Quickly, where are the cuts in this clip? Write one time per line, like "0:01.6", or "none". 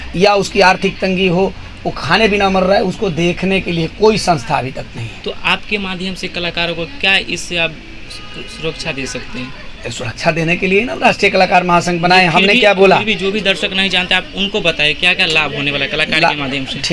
none